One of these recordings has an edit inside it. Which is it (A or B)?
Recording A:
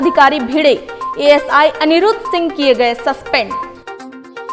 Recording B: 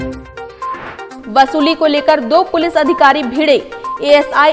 B